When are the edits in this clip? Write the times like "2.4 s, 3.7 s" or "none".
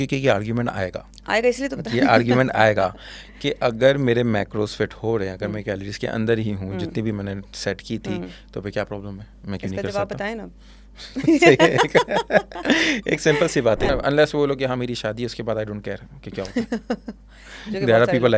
13.9 s